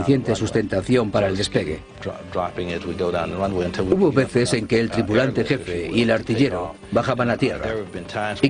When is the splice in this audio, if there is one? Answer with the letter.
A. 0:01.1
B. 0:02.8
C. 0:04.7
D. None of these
C